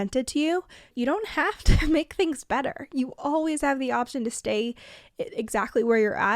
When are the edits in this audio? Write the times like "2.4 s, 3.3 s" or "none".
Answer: 0.9 s